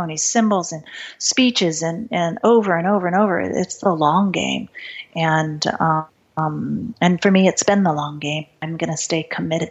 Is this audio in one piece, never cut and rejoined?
no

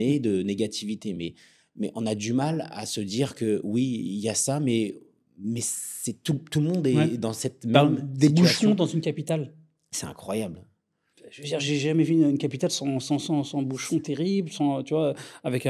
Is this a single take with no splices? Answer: yes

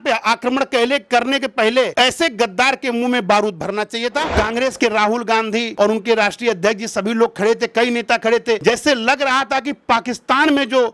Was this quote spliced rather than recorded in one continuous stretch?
yes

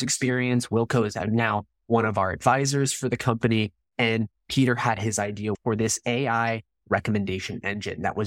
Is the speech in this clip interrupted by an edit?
yes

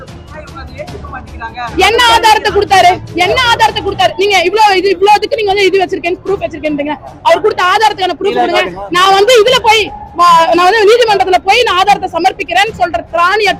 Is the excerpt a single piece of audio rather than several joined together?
yes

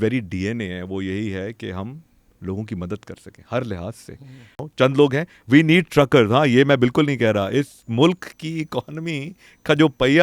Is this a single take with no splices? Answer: no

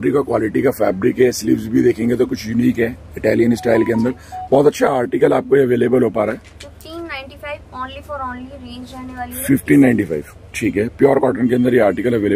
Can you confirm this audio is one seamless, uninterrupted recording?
yes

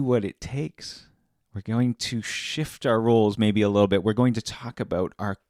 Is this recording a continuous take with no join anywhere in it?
yes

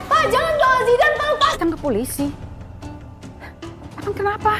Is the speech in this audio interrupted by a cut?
yes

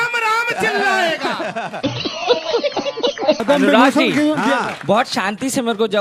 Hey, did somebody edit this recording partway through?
yes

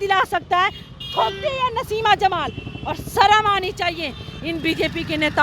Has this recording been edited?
no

